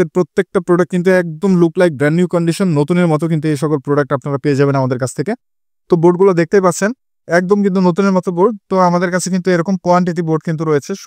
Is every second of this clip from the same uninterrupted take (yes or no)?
yes